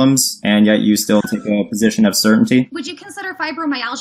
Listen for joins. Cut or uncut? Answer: cut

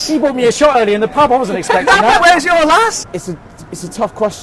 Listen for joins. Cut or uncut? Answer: cut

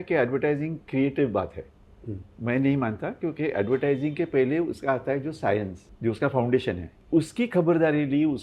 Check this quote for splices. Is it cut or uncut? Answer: cut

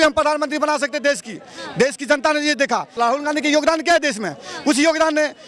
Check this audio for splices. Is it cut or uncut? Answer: uncut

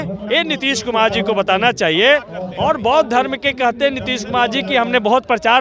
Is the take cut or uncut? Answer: uncut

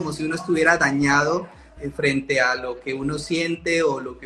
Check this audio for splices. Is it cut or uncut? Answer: uncut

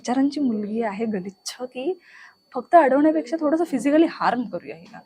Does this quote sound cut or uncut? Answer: uncut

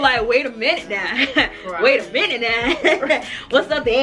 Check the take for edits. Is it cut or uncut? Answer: uncut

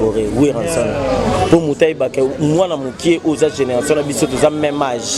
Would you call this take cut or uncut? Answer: uncut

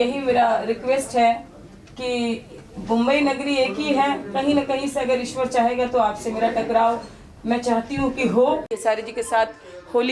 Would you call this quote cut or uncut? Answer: cut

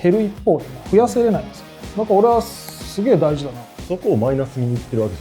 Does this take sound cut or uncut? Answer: cut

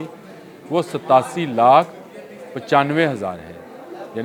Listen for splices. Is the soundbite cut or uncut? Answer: uncut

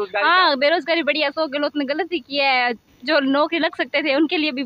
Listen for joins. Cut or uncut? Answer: uncut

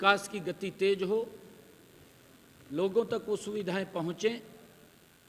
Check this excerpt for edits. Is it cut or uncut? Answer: uncut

